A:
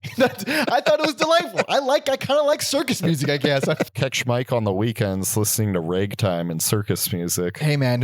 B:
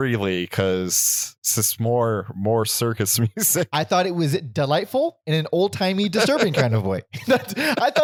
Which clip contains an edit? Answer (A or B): A